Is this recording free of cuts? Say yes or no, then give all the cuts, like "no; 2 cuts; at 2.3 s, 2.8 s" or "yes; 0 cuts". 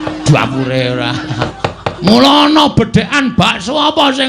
no; 1 cut; at 1.4 s